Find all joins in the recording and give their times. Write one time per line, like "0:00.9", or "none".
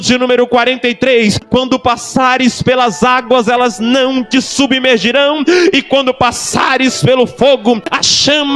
0:01.4
0:07.8